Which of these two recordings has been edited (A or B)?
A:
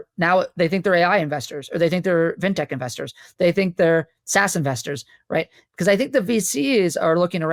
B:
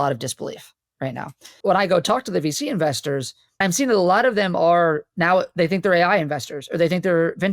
B